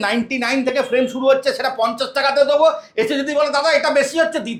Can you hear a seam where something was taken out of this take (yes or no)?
no